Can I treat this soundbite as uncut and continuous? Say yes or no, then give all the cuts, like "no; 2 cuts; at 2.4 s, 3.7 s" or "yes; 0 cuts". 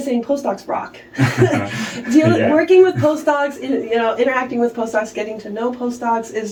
yes; 0 cuts